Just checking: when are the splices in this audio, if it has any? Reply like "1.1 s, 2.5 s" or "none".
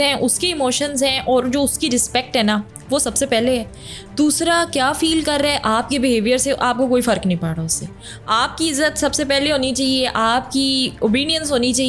none